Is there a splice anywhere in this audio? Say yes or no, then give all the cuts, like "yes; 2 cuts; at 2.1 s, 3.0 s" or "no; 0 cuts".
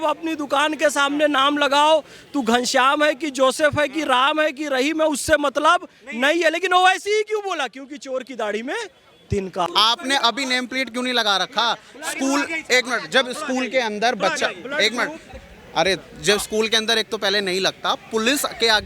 yes; 1 cut; at 9.7 s